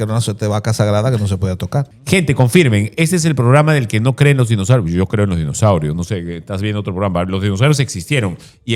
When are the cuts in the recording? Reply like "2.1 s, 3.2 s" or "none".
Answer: 1.9 s